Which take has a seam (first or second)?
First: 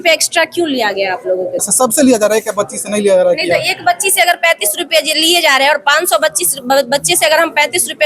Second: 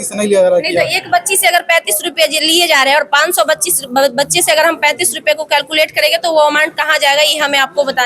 first